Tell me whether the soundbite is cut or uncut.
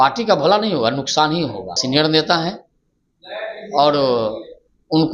cut